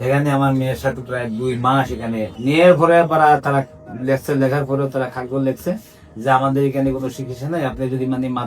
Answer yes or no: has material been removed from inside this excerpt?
yes